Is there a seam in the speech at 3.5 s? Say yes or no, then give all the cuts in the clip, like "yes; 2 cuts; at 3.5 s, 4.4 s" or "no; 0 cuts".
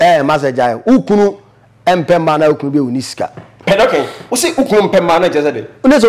yes; 1 cut; at 3.5 s